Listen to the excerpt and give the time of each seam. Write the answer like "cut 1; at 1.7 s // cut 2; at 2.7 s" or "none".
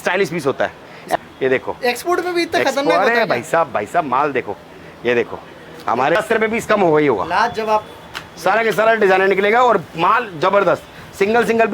cut 1; at 1.0 s // cut 2; at 6.2 s